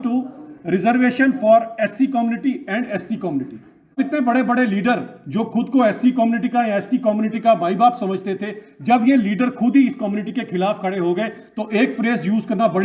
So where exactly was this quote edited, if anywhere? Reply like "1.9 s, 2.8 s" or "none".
4.0 s